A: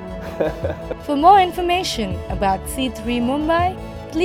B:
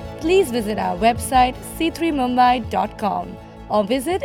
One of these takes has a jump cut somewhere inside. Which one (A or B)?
A